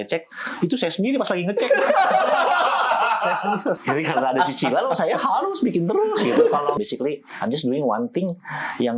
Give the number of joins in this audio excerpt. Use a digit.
2